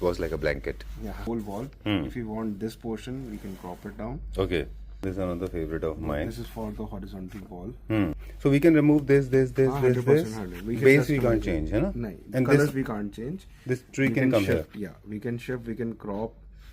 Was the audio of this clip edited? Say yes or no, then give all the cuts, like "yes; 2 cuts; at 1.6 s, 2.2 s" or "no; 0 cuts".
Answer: yes; 3 cuts; at 1.2 s, 5.0 s, 8.2 s